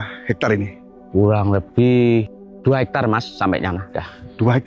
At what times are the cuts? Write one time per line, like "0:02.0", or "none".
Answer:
0:02.4